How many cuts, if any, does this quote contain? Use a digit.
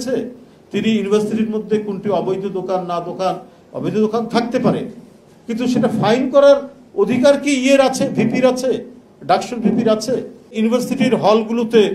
1